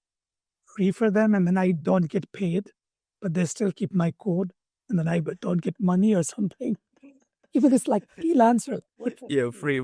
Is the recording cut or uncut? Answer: uncut